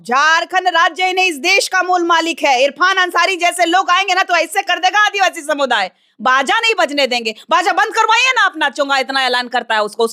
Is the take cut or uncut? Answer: uncut